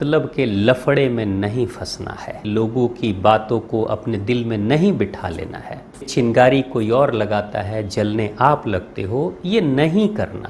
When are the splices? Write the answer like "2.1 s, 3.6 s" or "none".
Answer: 2.5 s, 6.1 s